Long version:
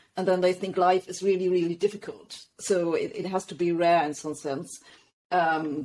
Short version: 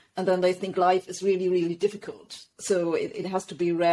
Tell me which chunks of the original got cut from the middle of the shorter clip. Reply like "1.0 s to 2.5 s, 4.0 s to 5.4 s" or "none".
none